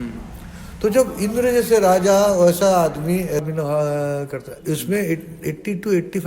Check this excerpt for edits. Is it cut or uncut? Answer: cut